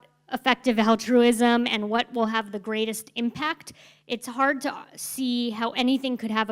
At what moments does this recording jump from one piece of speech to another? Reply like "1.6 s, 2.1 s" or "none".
none